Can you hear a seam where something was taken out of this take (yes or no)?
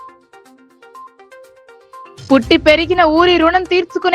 yes